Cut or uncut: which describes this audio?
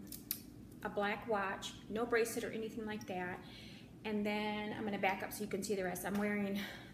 cut